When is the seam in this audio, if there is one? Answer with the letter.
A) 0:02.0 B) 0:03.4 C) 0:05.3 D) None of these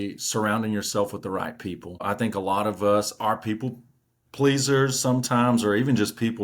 A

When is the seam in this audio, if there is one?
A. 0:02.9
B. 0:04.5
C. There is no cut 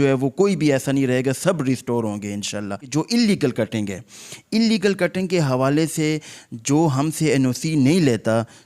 A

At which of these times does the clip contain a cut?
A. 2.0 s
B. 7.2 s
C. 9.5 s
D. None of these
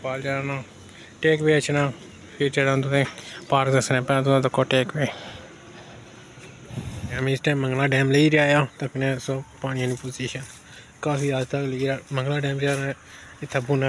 B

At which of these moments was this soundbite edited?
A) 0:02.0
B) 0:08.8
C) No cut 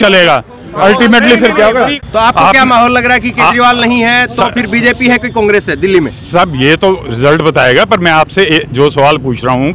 A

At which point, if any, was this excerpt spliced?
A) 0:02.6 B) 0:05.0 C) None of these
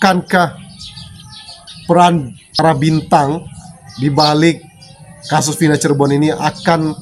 A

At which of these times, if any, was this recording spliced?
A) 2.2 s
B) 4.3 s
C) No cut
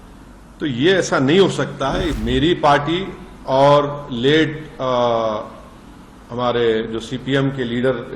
A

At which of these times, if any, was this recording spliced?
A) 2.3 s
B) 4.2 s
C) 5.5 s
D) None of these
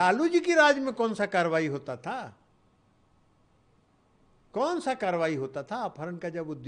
D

